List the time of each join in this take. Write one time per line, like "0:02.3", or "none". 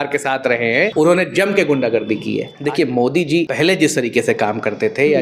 0:00.9
0:02.5
0:03.5